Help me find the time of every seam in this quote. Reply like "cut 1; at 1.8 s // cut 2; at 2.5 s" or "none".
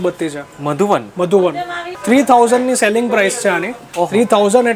cut 1; at 1.8 s

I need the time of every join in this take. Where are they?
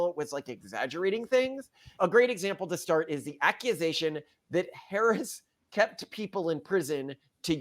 cut 1; at 2.0 s

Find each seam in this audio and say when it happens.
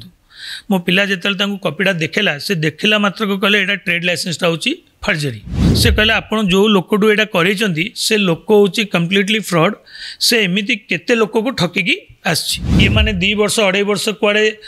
cut 1; at 5.6 s // cut 2; at 12.6 s

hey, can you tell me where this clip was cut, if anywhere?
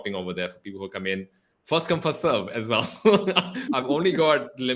cut 1; at 3.6 s

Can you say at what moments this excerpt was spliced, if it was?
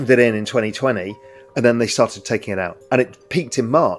cut 1; at 2.8 s

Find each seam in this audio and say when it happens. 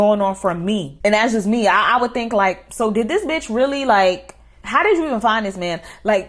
none

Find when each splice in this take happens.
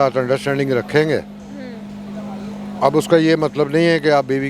none

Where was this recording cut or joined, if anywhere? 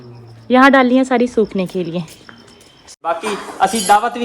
cut 1; at 2.9 s

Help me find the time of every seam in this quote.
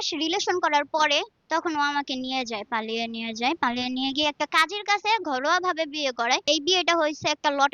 cut 1; at 1.4 s // cut 2; at 6.5 s

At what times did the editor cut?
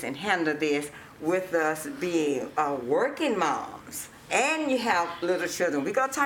cut 1; at 4.3 s

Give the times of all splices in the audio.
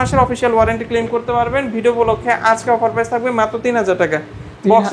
none

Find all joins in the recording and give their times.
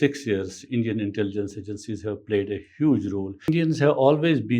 cut 1; at 3.5 s

